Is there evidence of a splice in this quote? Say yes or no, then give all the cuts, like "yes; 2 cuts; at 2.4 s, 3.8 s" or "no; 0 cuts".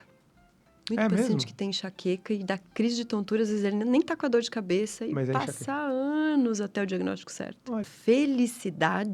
yes; 1 cut; at 7.9 s